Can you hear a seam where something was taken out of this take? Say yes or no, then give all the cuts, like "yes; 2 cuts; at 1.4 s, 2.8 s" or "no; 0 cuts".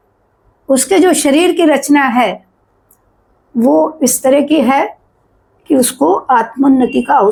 no; 0 cuts